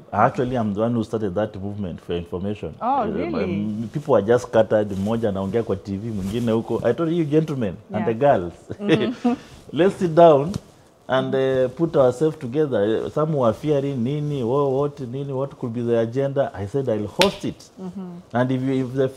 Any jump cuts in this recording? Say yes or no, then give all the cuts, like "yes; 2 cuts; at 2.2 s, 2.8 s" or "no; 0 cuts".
no; 0 cuts